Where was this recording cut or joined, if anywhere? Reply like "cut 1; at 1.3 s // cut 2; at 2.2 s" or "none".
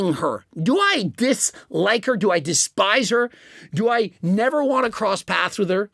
none